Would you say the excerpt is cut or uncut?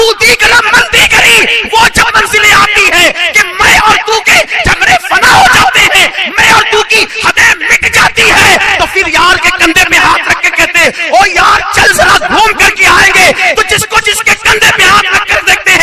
uncut